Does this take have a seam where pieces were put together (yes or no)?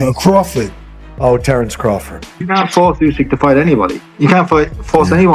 yes